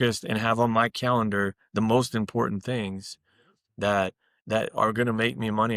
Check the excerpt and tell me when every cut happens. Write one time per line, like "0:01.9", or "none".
none